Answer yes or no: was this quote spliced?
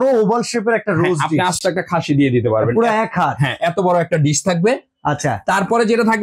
no